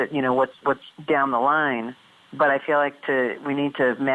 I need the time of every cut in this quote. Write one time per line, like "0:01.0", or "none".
none